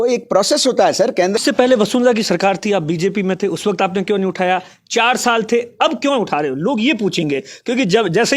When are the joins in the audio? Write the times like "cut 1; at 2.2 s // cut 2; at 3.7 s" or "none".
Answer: cut 1; at 1.4 s